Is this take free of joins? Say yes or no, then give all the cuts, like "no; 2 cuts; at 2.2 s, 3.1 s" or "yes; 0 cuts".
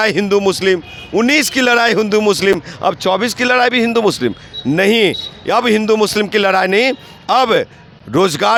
yes; 0 cuts